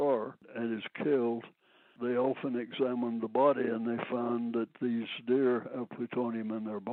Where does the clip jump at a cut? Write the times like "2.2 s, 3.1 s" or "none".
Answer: none

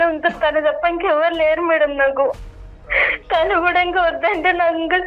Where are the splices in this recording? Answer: 2.5 s

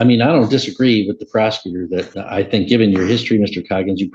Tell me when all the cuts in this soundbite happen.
2.2 s

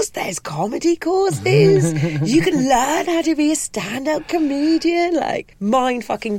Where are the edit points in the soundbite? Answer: 5.5 s

